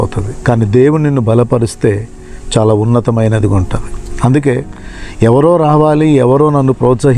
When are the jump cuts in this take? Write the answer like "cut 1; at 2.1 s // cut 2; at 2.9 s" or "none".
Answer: none